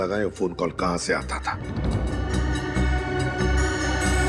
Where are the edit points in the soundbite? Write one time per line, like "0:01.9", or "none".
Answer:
0:02.0